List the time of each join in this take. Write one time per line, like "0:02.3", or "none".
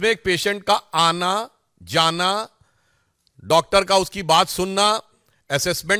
none